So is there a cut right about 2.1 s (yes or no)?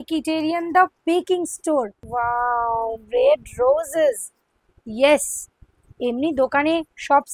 yes